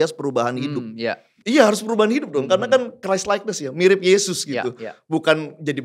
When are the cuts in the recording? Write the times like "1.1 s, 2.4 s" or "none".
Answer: 1.3 s